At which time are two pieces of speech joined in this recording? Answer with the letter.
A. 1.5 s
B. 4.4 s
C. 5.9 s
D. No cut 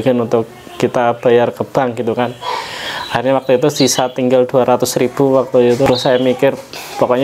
C